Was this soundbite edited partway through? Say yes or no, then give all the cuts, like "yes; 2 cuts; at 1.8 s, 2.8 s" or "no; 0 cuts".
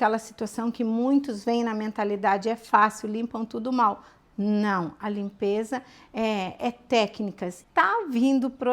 yes; 1 cut; at 7.5 s